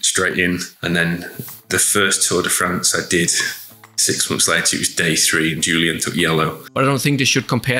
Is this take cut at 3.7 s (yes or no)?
no